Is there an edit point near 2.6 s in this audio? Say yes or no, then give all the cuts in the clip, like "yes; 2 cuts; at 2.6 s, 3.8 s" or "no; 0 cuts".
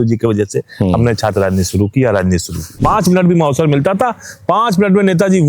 yes; 1 cut; at 2.6 s